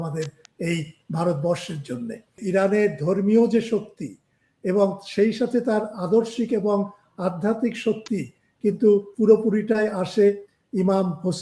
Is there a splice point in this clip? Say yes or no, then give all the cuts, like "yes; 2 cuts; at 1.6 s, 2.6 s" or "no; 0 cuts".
yes; 1 cut; at 2.4 s